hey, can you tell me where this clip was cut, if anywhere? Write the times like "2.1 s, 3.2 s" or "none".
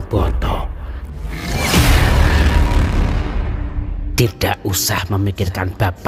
4.0 s